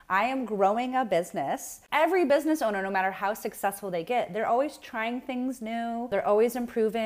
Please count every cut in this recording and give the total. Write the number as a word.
two